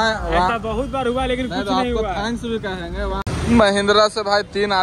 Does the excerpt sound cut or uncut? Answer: cut